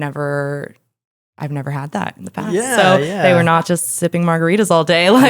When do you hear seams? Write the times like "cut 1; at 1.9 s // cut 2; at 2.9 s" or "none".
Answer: cut 1; at 3.2 s